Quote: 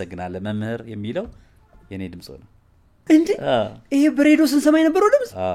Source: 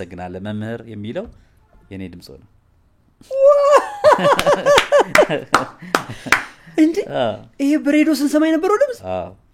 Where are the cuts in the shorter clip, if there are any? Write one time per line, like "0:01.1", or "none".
0:02.9